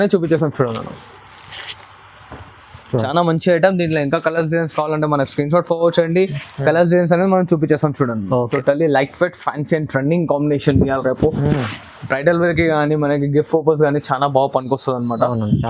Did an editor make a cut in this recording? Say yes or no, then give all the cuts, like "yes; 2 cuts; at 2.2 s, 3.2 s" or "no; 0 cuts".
yes; 2 cuts; at 2.9 s, 8.5 s